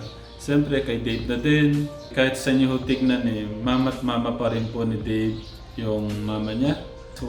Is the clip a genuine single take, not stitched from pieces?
yes; 0 cuts

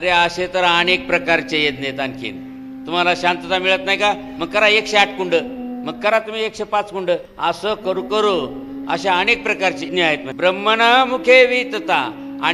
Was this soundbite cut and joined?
yes; 2 cuts; at 7.3 s, 9.9 s

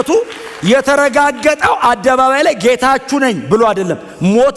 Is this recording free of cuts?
yes; 0 cuts

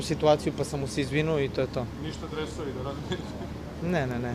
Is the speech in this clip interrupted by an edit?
no; 0 cuts

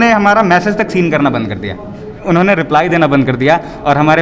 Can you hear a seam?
yes; 1 cut; at 2.2 s

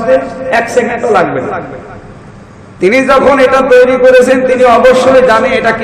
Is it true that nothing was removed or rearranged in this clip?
yes; 0 cuts

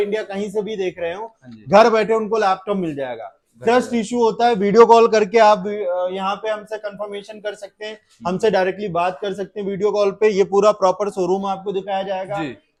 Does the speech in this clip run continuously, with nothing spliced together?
yes; 0 cuts

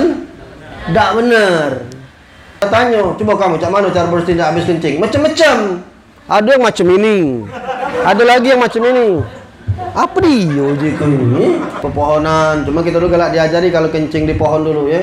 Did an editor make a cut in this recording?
yes; 2 cuts; at 2.6 s, 11.8 s

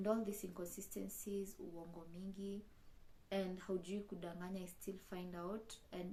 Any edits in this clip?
no; 0 cuts

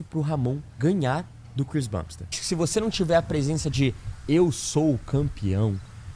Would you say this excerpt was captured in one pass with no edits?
no; 1 cut; at 2.4 s

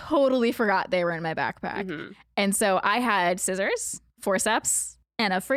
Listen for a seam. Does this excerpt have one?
no; 0 cuts

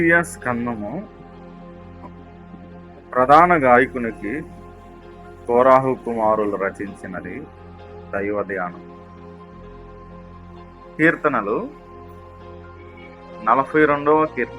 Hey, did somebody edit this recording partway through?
yes; 2 cuts; at 8.9 s, 11.0 s

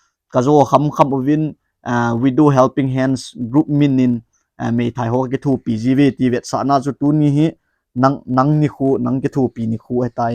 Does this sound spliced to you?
no; 0 cuts

